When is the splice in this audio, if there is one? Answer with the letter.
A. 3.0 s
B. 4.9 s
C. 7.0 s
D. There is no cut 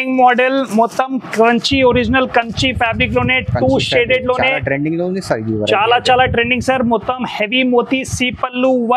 D